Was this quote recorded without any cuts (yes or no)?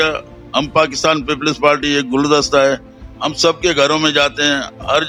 yes